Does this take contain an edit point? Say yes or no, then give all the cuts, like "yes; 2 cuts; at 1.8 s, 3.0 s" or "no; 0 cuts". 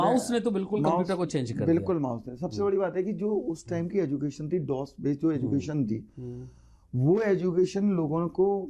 no; 0 cuts